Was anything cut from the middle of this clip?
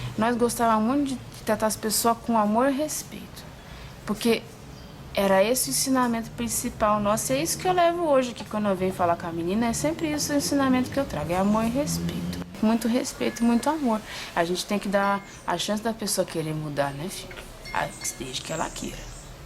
yes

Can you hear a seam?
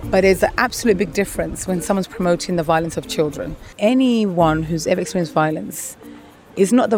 yes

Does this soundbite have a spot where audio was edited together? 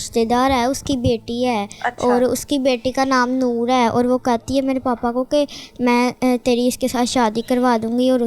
no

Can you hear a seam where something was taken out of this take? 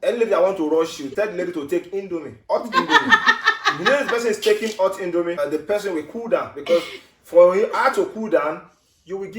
yes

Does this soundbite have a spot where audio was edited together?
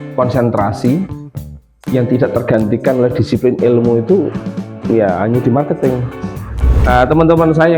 yes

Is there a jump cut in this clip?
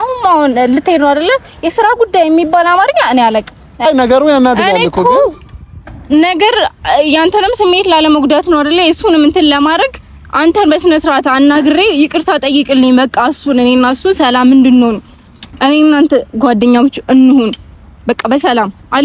yes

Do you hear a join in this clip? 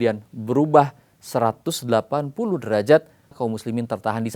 yes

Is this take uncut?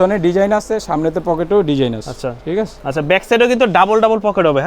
no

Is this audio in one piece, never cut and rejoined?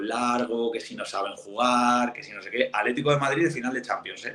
yes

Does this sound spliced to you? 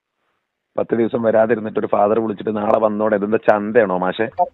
no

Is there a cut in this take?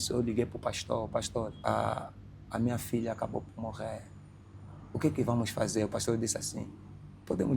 yes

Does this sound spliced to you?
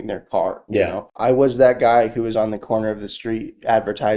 yes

